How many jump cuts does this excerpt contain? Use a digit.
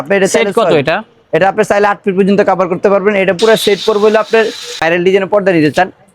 1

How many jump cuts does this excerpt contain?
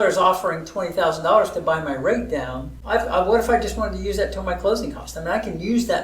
1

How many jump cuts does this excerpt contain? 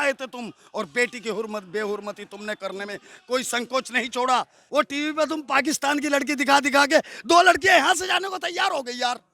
1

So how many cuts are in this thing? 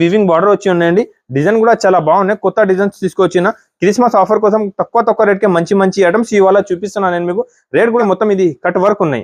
1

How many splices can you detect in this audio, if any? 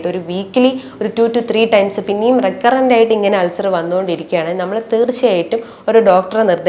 0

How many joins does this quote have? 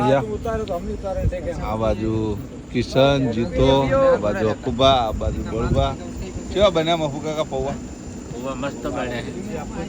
0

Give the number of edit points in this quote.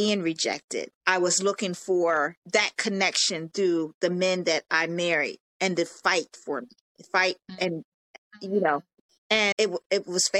2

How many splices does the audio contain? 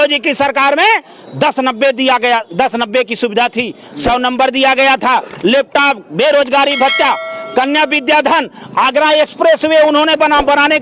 0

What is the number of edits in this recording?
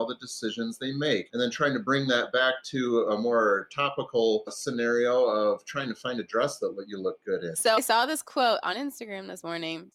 0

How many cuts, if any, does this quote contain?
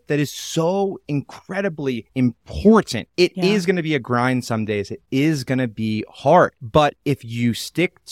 1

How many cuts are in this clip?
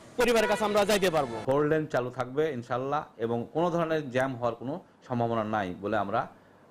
1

